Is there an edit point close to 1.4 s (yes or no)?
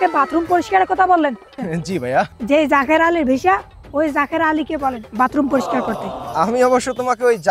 no